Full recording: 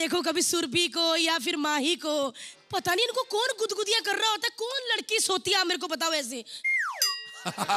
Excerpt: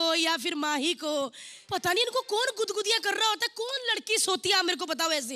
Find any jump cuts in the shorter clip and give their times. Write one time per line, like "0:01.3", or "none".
none